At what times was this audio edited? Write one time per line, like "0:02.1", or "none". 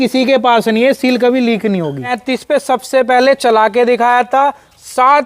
0:02.2